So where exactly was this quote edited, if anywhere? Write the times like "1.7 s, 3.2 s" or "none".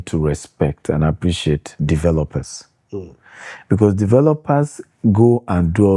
none